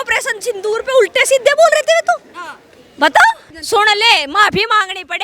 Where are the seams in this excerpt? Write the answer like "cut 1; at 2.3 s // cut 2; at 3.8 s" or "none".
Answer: cut 1; at 3.5 s

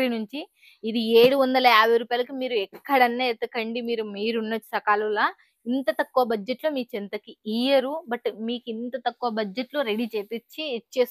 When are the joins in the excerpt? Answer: none

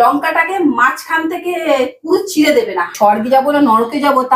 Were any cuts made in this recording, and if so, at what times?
cut 1; at 2.9 s

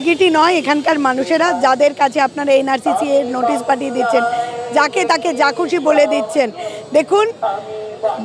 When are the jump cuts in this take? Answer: none

